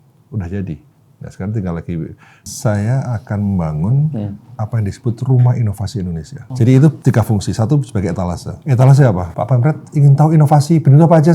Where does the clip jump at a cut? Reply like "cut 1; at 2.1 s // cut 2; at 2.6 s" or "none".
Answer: cut 1; at 2.5 s // cut 2; at 6.4 s // cut 3; at 7.0 s // cut 4; at 8.5 s // cut 5; at 9.3 s